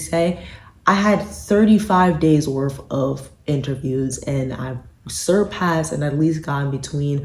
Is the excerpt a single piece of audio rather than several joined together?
yes; 0 cuts

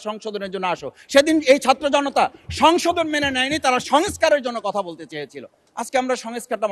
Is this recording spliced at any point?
no; 0 cuts

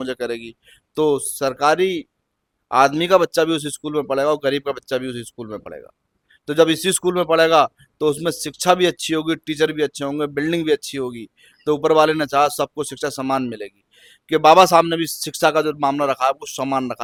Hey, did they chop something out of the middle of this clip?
no; 0 cuts

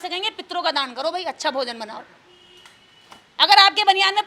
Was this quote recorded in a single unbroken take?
yes; 0 cuts

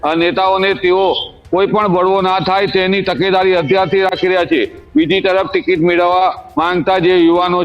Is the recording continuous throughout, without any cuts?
yes; 0 cuts

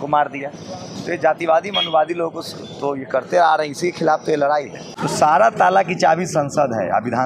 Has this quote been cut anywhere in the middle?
yes; 1 cut; at 4.8 s

